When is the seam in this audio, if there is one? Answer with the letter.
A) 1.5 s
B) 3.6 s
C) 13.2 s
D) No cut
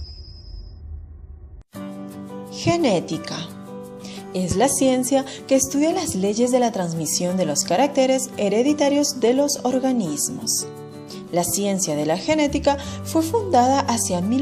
A